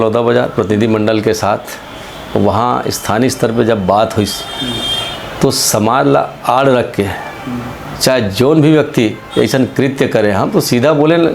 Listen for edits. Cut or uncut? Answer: uncut